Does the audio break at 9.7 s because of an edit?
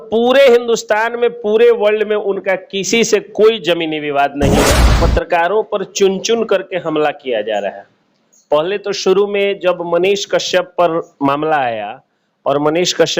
no; 1 cut; at 5.0 s

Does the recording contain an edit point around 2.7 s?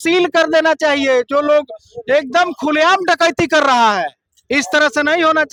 no; 0 cuts

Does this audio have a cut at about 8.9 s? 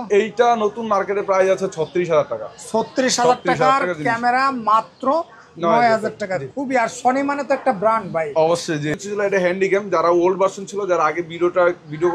yes; 1 cut; at 8.9 s

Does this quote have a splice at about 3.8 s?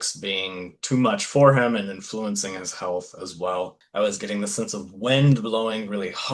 yes; 1 cut; at 3.8 s

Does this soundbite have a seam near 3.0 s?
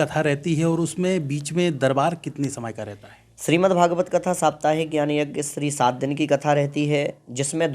no; 0 cuts

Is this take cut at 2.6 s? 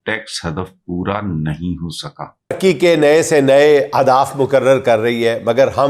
yes; 1 cut; at 2.6 s

